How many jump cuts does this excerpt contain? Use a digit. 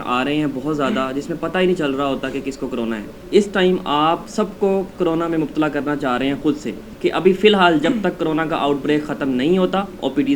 2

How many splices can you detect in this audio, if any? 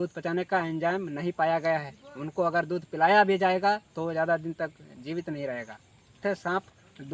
1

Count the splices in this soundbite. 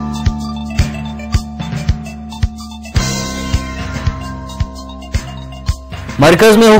0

